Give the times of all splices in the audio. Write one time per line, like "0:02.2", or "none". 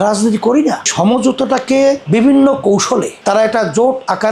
0:00.9
0:03.2

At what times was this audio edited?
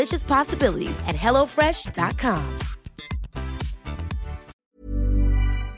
0:04.5

